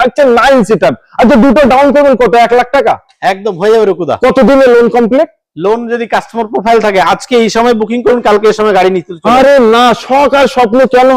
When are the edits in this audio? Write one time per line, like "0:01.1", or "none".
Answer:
none